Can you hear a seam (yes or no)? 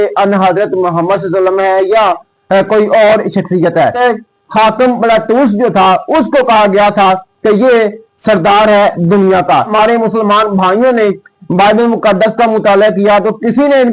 yes